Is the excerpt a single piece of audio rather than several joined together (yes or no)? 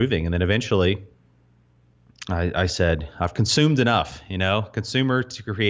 yes